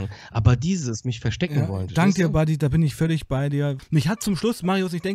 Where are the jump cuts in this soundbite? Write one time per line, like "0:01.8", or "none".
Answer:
0:03.8